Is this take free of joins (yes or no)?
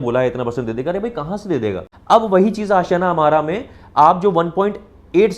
no